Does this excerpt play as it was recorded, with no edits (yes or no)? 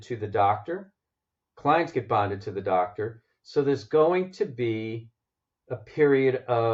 yes